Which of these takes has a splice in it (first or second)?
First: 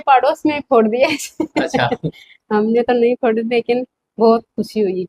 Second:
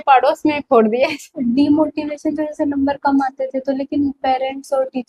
second